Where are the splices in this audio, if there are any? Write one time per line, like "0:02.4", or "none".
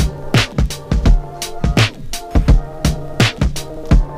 none